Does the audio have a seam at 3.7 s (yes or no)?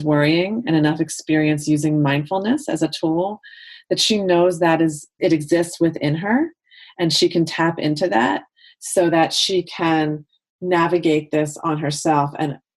no